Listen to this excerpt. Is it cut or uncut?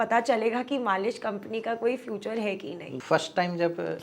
cut